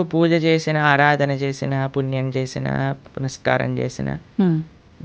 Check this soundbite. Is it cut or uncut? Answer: uncut